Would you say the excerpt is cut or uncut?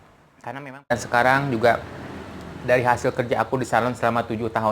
cut